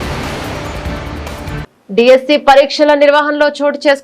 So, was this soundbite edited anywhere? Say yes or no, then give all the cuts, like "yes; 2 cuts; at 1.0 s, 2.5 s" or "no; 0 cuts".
yes; 1 cut; at 1.6 s